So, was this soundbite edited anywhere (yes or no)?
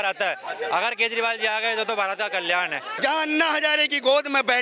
yes